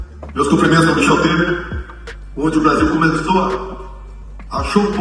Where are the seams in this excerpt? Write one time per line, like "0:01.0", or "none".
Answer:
none